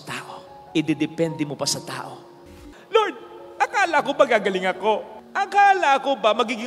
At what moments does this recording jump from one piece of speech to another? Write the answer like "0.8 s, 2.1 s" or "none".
2.4 s

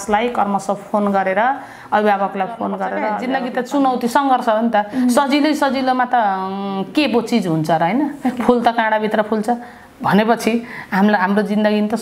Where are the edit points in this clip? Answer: 3.1 s

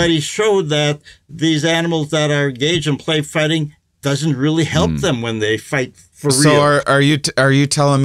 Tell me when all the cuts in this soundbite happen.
6.3 s

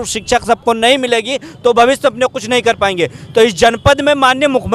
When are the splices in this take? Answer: none

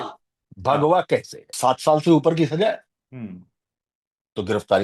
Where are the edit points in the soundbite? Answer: 1.4 s

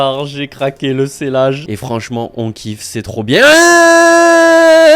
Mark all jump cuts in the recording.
1.7 s

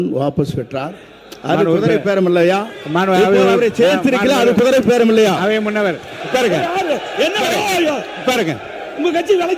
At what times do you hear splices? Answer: none

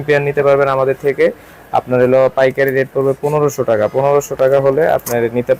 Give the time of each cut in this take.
none

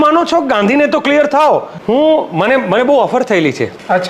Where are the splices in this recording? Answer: 1.7 s

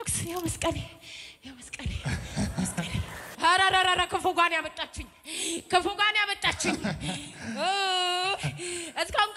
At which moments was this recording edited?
3.2 s

